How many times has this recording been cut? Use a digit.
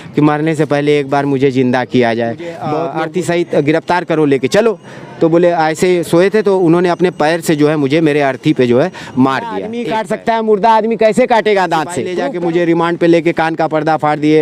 3